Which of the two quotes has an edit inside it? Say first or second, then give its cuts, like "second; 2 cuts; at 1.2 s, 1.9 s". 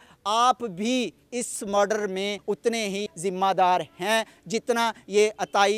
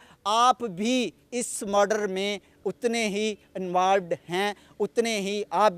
first; 1 cut; at 2.8 s